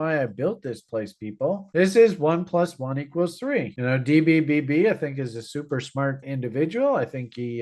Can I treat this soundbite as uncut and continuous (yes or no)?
no